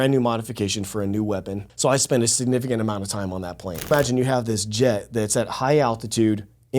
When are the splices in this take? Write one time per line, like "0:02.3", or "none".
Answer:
0:01.7
0:03.9